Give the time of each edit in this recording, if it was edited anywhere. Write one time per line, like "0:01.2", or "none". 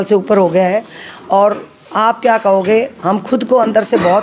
none